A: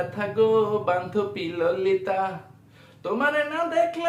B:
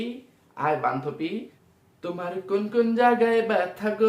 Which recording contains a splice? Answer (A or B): B